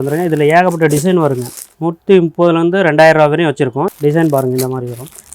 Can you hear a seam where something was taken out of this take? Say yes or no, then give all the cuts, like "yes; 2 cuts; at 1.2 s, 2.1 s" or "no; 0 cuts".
yes; 2 cuts; at 1.7 s, 3.9 s